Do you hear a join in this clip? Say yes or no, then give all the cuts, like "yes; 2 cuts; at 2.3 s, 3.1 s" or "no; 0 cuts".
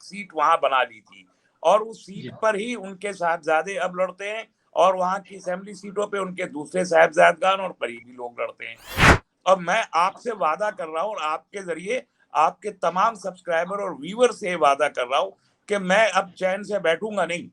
yes; 1 cut; at 9.1 s